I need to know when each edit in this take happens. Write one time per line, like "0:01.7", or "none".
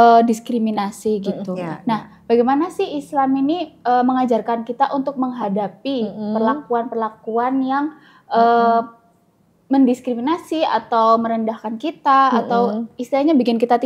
none